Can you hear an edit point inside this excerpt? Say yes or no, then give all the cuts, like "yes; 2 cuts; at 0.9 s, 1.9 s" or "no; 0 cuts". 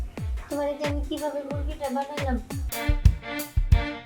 yes; 1 cut; at 2.9 s